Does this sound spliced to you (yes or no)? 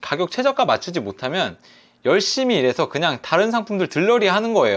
no